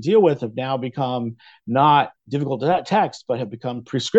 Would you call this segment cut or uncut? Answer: uncut